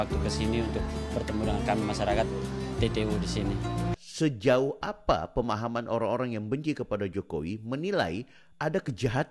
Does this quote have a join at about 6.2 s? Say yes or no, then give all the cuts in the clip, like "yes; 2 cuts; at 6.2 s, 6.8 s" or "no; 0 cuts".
no; 1 cut; at 4.0 s